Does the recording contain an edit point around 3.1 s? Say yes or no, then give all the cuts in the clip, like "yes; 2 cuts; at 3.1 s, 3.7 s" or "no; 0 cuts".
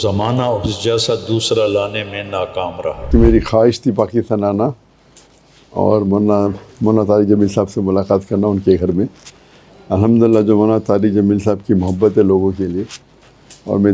yes; 1 cut; at 3.1 s